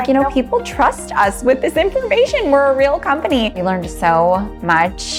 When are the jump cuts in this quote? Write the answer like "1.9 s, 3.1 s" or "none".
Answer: none